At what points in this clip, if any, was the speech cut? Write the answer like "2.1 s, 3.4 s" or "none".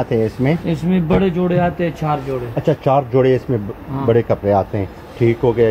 none